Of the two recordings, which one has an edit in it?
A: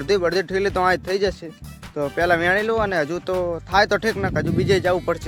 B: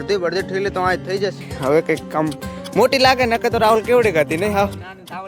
B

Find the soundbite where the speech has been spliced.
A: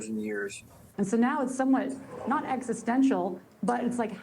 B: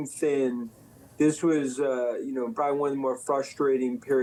A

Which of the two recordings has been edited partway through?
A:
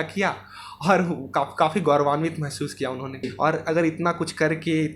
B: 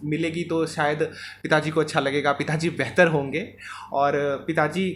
A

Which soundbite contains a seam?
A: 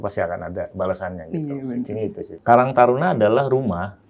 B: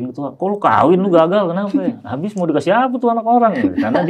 A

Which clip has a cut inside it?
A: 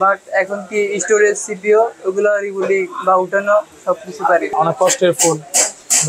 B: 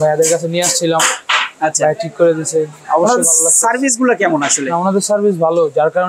A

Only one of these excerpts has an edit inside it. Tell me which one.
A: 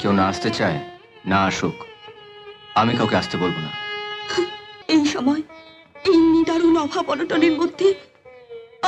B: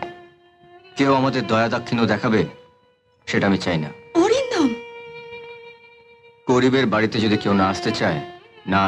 A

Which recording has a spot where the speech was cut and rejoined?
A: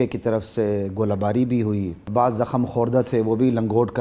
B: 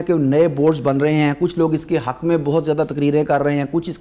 A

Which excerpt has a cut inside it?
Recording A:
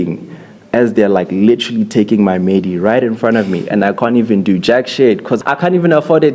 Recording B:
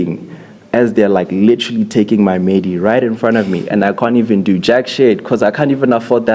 A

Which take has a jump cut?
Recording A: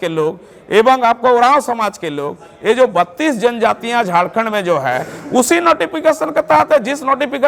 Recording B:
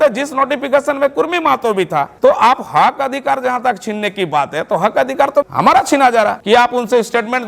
B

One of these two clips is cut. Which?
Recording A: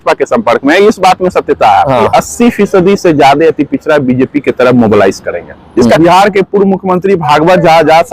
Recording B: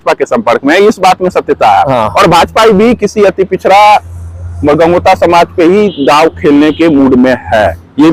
A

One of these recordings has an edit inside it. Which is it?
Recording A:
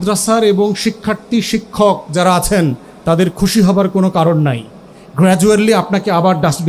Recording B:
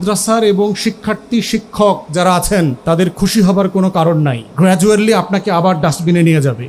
B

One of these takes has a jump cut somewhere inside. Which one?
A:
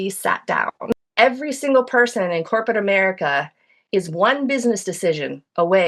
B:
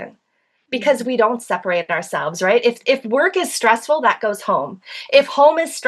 A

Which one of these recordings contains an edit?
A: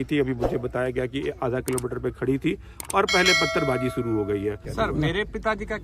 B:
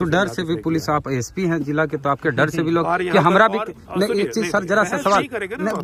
A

